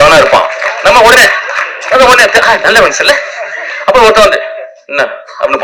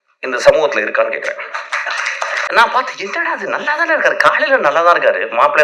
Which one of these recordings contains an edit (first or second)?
second